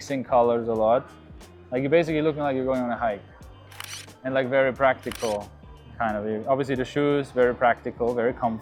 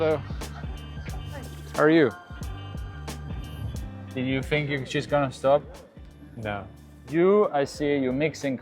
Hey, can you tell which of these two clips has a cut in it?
second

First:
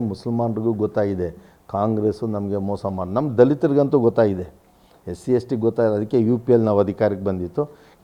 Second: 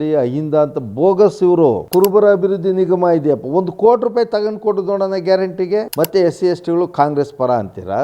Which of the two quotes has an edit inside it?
second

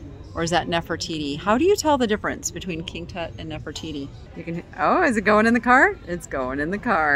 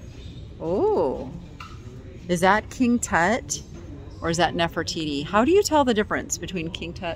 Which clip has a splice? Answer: first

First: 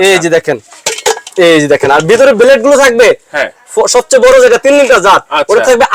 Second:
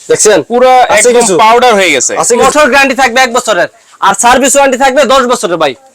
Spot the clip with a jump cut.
second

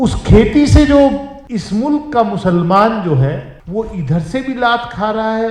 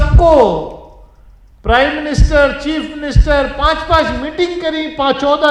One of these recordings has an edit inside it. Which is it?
first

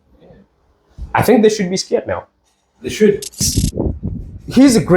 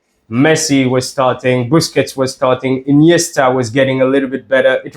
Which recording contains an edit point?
first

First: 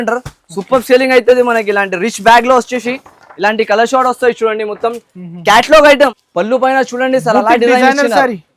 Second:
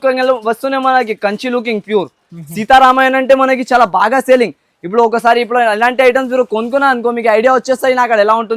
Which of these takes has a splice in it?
first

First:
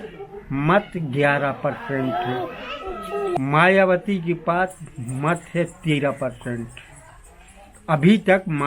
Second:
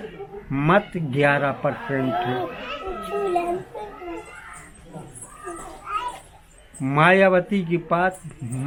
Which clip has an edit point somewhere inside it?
first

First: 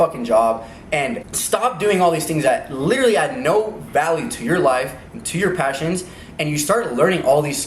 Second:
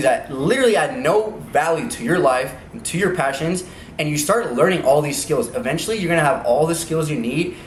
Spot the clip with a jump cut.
first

